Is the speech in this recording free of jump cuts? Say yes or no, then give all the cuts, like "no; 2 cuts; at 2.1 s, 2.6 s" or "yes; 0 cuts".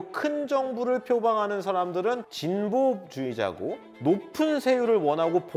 no; 2 cuts; at 2.2 s, 3.8 s